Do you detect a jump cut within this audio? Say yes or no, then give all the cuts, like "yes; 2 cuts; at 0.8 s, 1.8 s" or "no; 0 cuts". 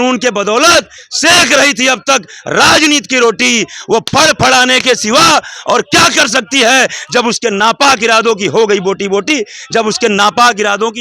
no; 0 cuts